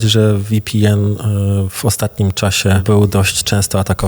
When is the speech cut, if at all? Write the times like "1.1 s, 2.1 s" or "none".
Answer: 2.8 s